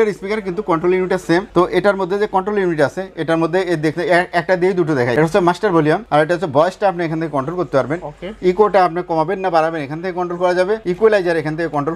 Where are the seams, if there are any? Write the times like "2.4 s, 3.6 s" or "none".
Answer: none